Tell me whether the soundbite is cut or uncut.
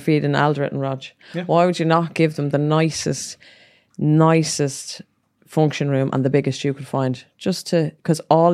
uncut